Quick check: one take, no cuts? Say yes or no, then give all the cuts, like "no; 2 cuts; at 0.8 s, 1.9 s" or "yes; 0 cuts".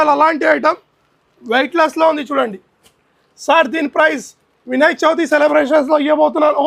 yes; 0 cuts